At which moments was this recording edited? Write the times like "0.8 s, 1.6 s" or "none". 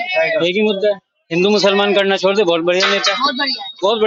none